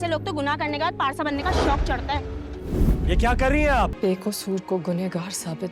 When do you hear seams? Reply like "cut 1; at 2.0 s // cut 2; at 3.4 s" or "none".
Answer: cut 1; at 3.9 s